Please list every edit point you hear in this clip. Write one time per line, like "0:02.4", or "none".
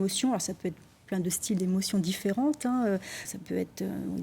0:03.2